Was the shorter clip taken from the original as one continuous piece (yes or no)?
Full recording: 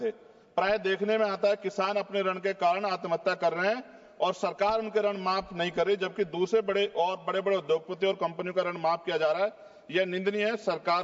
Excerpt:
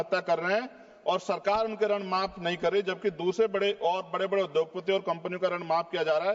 yes